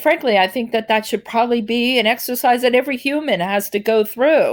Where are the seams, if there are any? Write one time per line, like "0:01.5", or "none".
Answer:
none